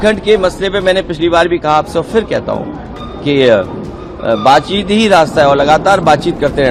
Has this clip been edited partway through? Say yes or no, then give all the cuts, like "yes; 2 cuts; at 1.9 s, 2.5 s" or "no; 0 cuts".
no; 0 cuts